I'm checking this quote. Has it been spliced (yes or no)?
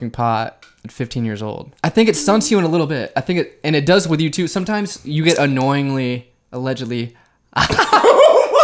yes